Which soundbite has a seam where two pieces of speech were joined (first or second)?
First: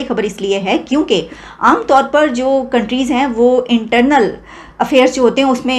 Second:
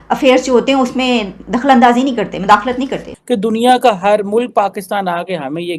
second